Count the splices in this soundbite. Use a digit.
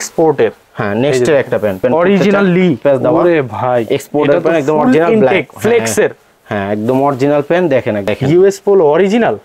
3